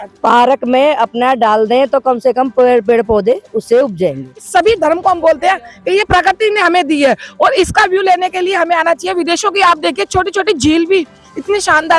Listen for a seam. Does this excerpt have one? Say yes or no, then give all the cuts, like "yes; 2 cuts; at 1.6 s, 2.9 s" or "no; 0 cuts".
yes; 1 cut; at 4.4 s